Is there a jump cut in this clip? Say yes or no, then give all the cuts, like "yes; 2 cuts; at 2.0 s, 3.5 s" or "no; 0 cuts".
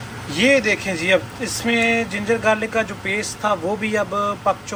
no; 0 cuts